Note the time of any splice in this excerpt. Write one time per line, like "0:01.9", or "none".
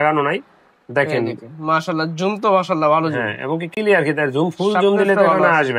none